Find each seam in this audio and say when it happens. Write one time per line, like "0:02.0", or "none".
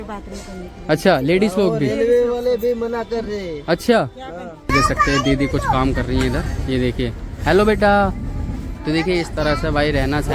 none